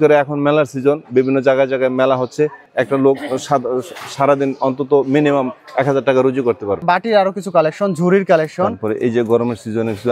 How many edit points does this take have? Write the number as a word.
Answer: two